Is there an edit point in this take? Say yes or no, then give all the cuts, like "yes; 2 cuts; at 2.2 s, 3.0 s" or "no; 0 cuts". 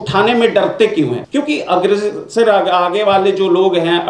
yes; 1 cut; at 1.2 s